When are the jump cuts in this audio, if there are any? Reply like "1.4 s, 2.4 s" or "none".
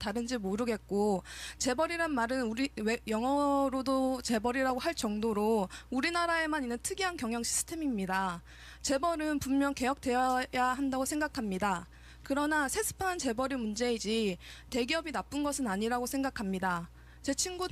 11.3 s